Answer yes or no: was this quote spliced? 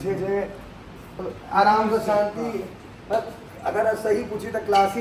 no